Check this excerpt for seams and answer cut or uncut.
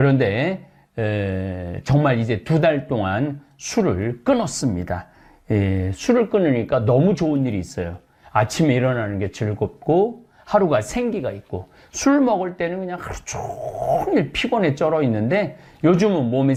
uncut